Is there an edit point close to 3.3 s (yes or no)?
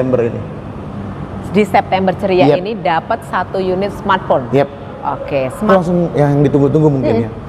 no